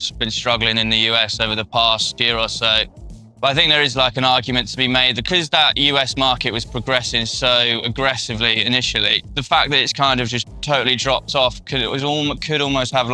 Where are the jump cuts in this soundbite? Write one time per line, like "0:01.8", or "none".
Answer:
0:02.2
0:05.2
0:09.3

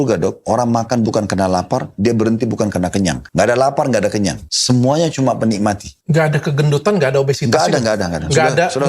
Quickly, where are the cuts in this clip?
0:03.2
0:04.5
0:05.9

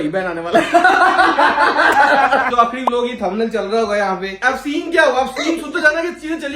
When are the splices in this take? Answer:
0:02.5
0:04.3

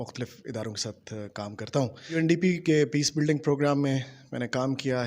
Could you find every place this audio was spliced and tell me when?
0:02.2

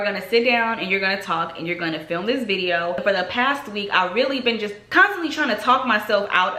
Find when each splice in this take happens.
0:04.8

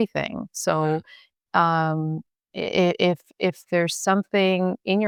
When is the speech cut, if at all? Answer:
none

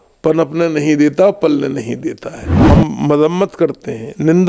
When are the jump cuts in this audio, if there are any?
0:02.6

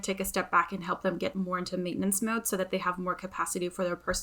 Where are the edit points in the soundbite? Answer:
none

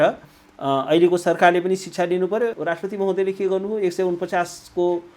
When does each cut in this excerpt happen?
0:02.6

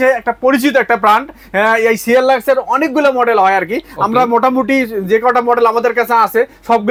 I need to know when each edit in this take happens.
none

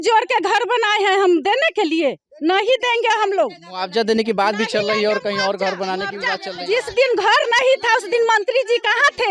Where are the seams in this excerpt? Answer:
none

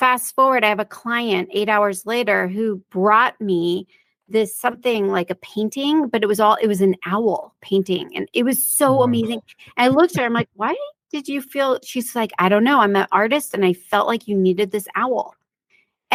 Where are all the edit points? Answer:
none

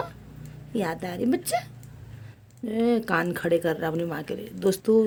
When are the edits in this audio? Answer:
none

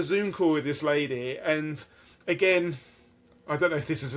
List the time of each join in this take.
none

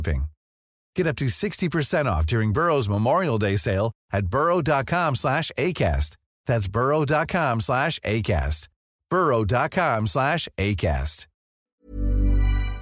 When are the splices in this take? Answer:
0:11.7

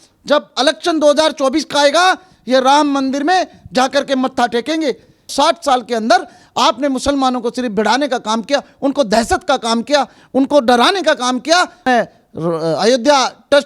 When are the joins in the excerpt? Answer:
0:05.3
0:11.9

